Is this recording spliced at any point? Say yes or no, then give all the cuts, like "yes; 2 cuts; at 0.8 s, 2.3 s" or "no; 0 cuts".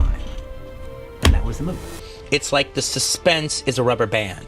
yes; 1 cut; at 1.9 s